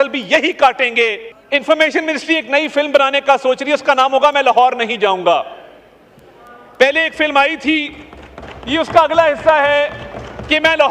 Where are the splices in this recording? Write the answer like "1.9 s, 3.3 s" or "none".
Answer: 1.3 s